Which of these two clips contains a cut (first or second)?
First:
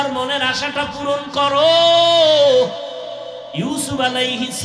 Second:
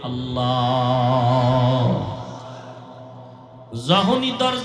second